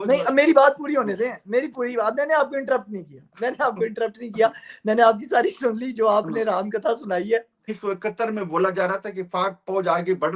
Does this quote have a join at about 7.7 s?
yes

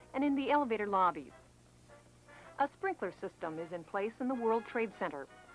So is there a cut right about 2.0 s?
no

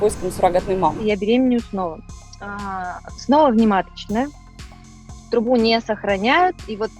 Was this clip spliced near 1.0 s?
yes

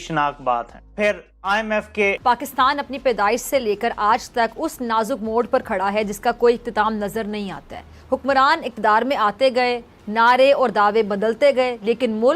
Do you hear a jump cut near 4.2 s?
no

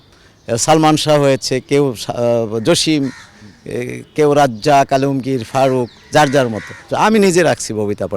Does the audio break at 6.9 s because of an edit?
yes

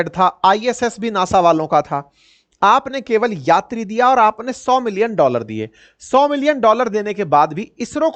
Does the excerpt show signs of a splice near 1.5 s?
no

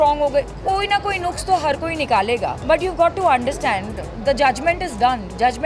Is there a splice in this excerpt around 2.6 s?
yes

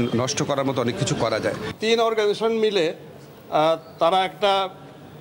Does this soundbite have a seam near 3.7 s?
no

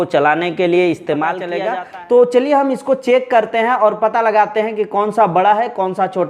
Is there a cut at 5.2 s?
no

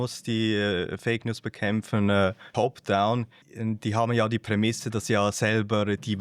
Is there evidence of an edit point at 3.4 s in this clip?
yes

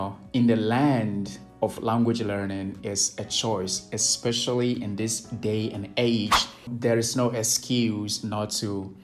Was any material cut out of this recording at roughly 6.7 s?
yes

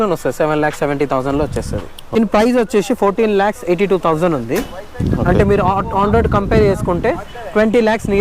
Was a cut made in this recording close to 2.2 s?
yes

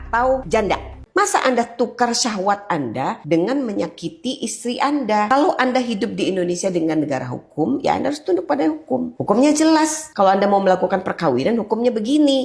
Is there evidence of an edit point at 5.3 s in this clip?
yes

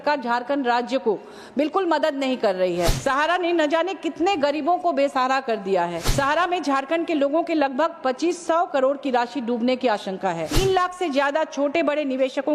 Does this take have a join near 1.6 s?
no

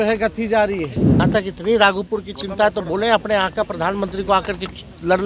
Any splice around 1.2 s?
yes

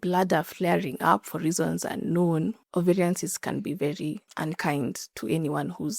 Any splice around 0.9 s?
no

